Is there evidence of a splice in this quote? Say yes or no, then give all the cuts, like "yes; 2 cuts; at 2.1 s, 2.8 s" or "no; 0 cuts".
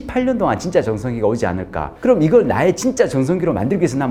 no; 0 cuts